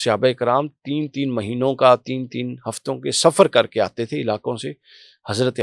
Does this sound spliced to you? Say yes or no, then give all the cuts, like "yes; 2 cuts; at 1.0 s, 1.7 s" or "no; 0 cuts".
no; 0 cuts